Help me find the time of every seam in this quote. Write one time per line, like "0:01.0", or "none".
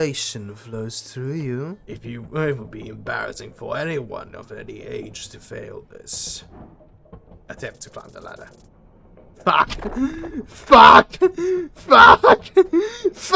0:01.9